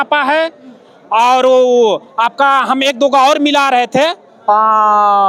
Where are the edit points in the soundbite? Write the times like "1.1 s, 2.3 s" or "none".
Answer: none